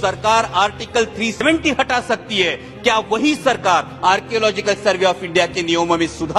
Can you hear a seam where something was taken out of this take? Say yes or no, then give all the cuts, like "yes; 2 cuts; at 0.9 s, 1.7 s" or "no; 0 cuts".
yes; 1 cut; at 1.4 s